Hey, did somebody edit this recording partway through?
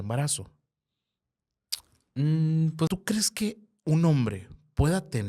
yes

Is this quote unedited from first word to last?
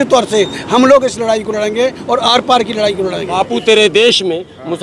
no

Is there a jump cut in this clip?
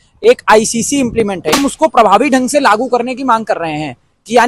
yes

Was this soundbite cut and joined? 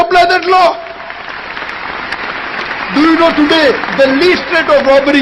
no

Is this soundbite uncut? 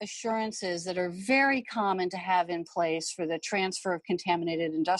yes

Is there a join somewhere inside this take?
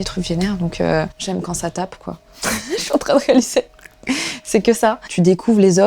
yes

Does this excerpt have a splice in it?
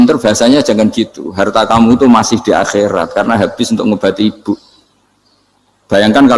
no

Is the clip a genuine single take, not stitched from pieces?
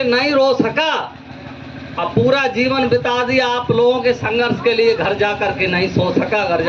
yes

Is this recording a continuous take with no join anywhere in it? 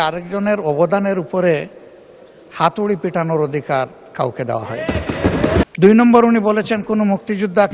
no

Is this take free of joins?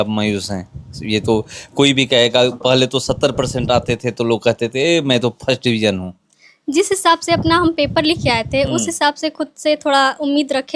yes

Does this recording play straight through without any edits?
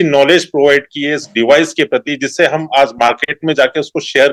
yes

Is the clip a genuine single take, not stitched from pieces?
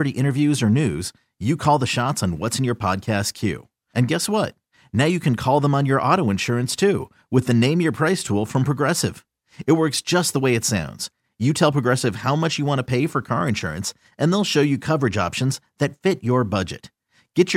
yes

